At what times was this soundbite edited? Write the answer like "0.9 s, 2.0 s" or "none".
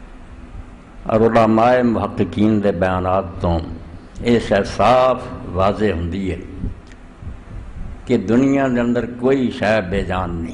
2.4 s

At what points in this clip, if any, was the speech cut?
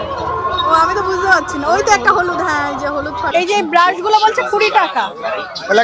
3.3 s

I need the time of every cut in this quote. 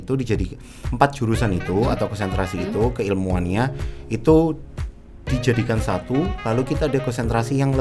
none

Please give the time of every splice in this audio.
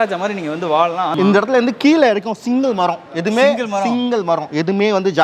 1.1 s

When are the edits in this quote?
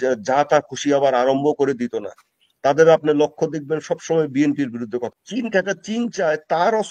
5.1 s

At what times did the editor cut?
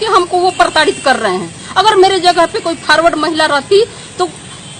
none

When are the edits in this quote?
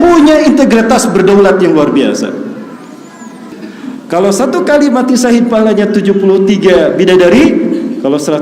3.6 s

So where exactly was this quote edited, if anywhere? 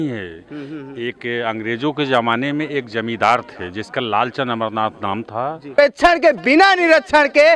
5.8 s

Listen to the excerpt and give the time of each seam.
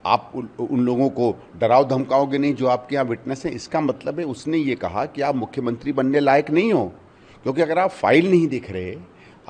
none

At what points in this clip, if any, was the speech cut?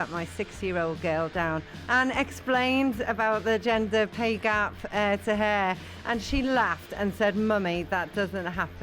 1.7 s

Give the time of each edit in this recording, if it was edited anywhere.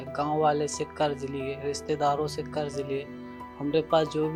none

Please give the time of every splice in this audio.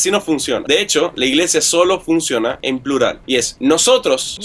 none

